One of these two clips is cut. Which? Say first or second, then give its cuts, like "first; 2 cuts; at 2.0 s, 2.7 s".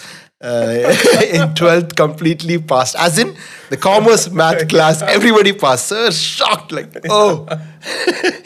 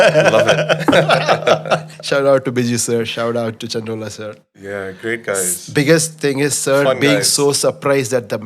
second; 1 cut; at 2.0 s